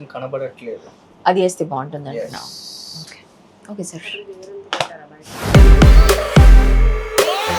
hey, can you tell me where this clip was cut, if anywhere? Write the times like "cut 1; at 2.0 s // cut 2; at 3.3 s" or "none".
none